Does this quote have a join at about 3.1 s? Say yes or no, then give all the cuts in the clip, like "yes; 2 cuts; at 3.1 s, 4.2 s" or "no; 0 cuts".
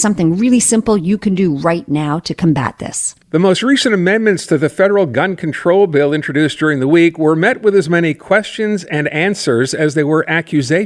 yes; 1 cut; at 3.1 s